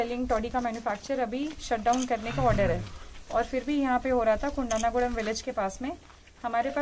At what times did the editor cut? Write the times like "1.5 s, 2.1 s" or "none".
none